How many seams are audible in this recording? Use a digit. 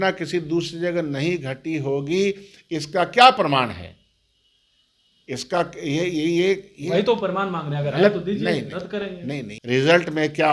1